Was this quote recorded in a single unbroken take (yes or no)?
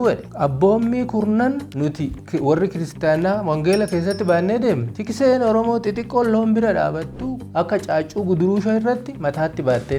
yes